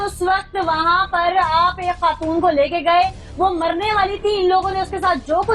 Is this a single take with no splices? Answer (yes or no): yes